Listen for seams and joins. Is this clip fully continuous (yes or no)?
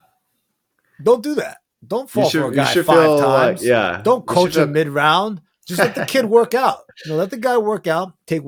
yes